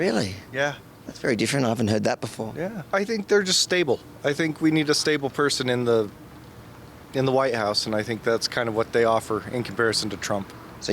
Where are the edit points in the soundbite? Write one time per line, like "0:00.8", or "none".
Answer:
0:02.8